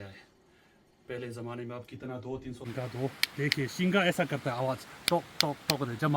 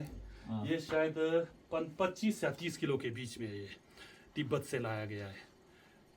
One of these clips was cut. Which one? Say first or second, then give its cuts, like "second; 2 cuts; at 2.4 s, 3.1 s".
first; 1 cut; at 2.6 s